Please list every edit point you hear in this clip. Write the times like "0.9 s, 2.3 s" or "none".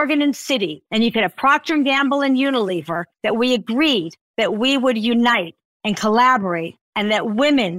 4.2 s